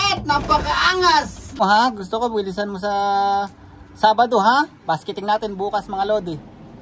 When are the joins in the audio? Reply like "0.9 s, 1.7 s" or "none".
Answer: 1.5 s